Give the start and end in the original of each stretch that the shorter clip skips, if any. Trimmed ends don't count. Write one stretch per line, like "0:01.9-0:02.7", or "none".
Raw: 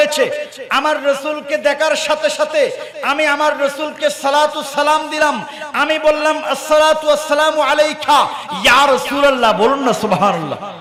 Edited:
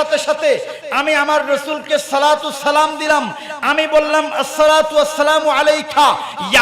none